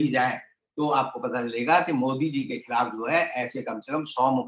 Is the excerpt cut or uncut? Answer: uncut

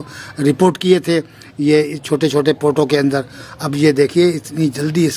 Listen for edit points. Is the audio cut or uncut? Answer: uncut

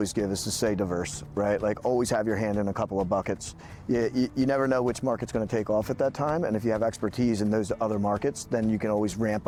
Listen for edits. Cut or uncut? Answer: uncut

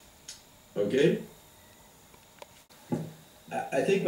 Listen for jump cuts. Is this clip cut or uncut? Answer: uncut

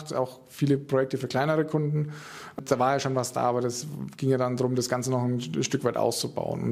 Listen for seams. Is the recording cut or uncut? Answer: cut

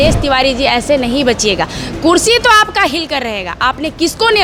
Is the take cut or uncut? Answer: uncut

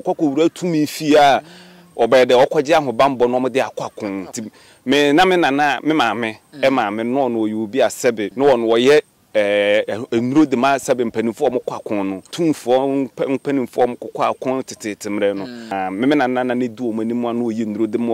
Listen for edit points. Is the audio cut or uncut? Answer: cut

